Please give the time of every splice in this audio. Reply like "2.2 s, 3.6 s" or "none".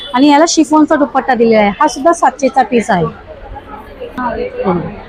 none